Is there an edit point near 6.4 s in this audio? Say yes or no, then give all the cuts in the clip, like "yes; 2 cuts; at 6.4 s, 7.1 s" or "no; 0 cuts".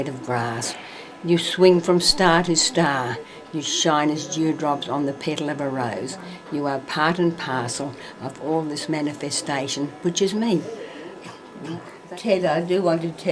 no; 1 cut; at 11.9 s